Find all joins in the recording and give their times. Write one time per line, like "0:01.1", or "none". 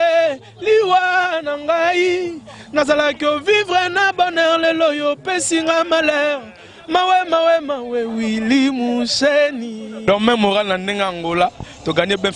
0:09.9